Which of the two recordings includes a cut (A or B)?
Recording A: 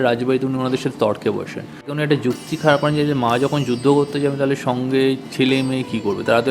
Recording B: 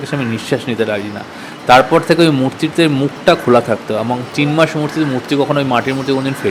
A